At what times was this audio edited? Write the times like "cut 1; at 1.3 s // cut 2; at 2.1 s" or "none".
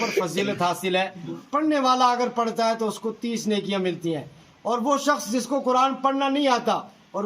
cut 1; at 1.4 s